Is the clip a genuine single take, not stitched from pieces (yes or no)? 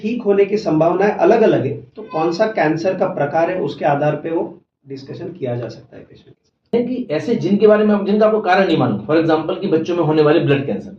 no